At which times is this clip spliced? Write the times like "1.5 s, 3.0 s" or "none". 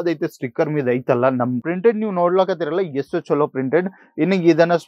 1.6 s